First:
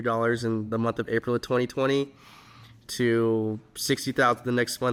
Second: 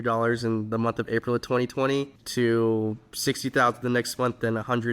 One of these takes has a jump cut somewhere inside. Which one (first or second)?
second